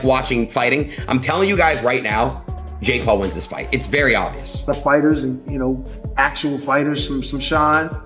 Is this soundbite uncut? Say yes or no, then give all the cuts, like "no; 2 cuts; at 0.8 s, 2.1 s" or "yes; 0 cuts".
no; 1 cut; at 4.7 s